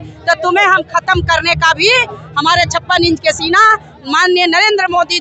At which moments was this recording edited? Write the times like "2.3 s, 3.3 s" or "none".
none